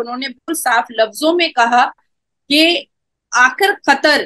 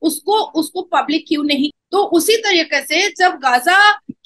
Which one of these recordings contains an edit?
second; 1 cut; at 1.7 s

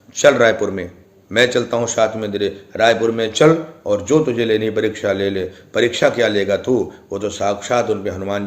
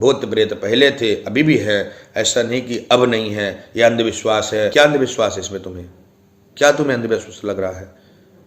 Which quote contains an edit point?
second; 1 cut; at 4.7 s

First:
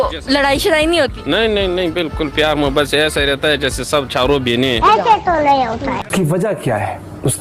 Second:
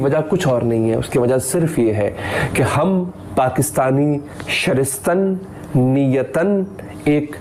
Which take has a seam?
first; 1 cut; at 6.0 s

